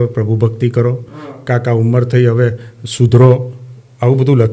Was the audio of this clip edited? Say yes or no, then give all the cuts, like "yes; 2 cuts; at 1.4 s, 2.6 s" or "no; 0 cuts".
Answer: no; 0 cuts